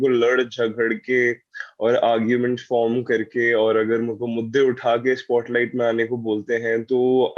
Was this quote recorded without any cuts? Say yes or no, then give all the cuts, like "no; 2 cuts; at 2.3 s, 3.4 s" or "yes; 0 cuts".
yes; 0 cuts